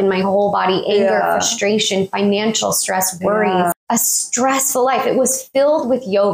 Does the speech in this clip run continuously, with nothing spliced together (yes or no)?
no